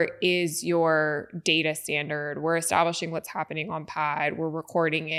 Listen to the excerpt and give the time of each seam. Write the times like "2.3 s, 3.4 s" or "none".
none

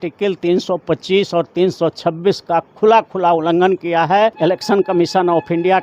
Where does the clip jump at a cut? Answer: 4.4 s

